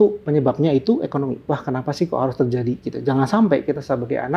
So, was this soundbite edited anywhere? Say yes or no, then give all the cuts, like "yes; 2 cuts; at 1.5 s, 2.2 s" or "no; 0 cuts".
yes; 1 cut; at 1.4 s